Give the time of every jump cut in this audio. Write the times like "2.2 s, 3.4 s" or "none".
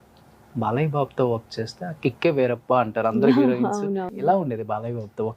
4.1 s